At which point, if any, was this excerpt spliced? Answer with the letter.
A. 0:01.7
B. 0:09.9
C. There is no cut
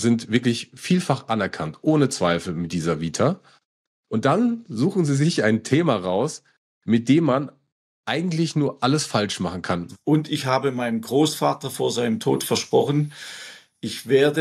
B